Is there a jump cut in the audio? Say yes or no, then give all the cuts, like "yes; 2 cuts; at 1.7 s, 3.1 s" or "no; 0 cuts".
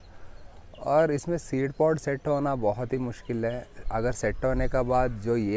no; 0 cuts